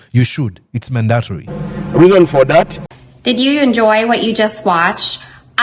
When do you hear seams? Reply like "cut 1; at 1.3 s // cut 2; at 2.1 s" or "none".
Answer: cut 1; at 2.8 s